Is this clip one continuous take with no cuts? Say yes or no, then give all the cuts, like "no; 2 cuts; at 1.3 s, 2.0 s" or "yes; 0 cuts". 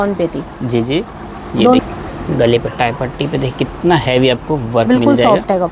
no; 1 cut; at 1.8 s